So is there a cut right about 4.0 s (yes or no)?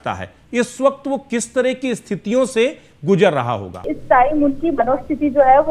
yes